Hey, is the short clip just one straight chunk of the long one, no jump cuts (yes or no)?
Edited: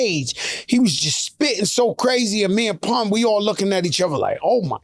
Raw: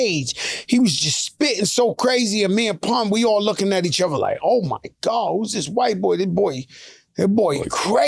yes